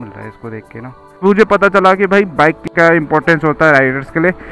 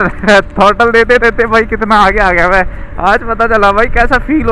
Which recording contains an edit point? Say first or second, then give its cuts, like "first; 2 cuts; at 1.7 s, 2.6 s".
first; 2 cuts; at 1.1 s, 2.5 s